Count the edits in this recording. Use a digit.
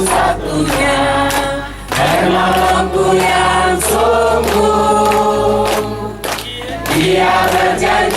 0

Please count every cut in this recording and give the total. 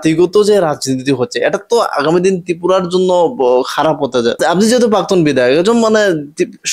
1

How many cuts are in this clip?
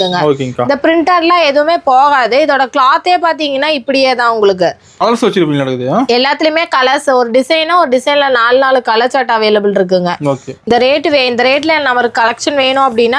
2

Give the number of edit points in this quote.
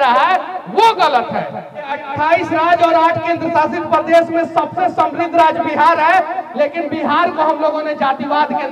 1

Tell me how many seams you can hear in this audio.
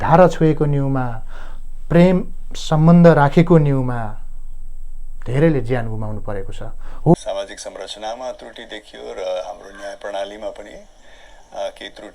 1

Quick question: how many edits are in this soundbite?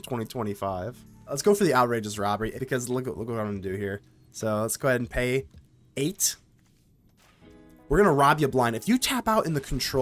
2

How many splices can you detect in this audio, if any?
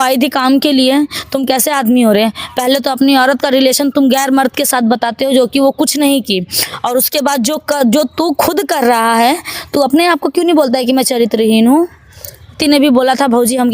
1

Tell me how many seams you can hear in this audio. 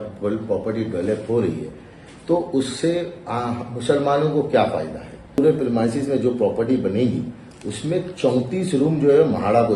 1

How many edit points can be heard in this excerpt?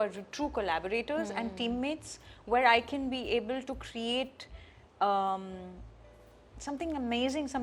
0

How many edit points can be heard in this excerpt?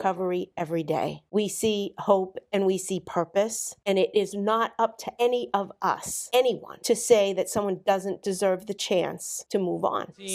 5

